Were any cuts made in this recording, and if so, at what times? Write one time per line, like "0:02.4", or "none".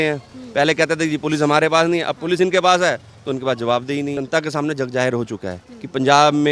0:04.2